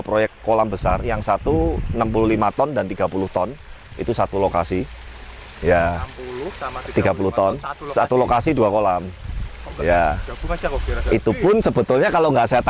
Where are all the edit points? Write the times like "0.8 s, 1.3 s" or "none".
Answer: none